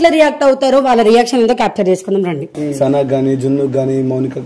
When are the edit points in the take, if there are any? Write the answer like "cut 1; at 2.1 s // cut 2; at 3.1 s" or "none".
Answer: cut 1; at 2.5 s